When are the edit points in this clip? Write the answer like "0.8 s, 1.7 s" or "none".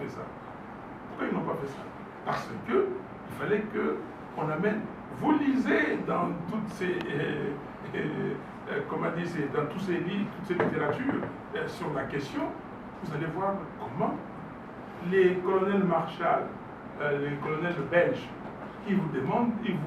none